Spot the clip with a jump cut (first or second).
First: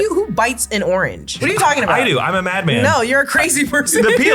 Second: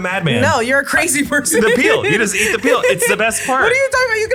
first